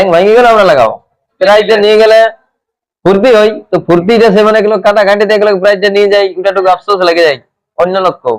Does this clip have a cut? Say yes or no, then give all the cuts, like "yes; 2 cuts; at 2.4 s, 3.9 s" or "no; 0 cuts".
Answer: yes; 1 cut; at 1.3 s